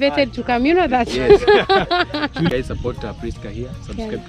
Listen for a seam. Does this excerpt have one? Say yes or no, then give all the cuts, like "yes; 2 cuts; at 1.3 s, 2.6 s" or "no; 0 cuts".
yes; 1 cut; at 2.5 s